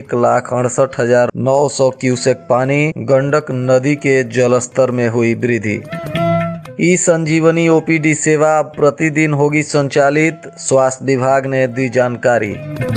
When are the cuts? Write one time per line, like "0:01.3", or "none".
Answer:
none